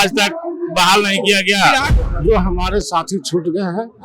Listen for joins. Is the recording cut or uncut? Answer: cut